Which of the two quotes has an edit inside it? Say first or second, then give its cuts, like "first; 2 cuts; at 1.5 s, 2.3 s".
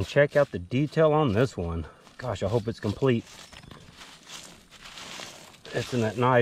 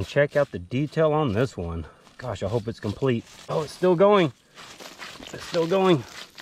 second; 1 cut; at 3.4 s